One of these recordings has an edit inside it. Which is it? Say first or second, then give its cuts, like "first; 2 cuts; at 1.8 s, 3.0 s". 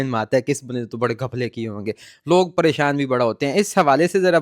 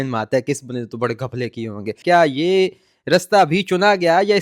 second; 1 cut; at 2.0 s